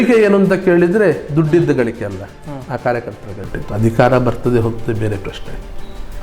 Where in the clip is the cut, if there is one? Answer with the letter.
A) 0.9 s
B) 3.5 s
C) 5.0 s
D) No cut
B